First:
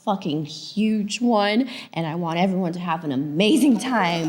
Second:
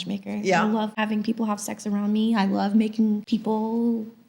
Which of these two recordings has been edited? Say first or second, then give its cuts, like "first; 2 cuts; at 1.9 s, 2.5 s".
second; 2 cuts; at 0.9 s, 3.2 s